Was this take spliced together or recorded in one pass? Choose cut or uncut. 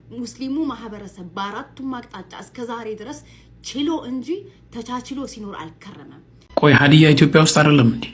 cut